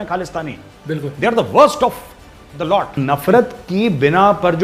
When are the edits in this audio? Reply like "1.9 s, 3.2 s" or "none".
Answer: 2.9 s